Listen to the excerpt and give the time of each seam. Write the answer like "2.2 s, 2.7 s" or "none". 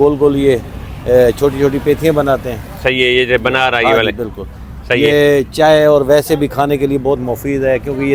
none